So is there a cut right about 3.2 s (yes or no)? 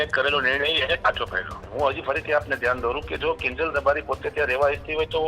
no